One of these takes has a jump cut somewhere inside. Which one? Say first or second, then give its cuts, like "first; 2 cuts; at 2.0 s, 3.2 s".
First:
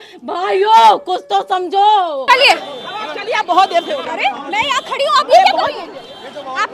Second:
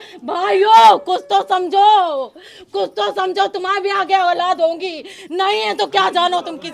first; 1 cut; at 2.3 s